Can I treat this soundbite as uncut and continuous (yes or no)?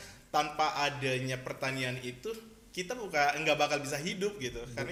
yes